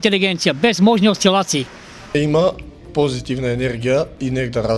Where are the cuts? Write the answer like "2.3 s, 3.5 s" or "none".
2.1 s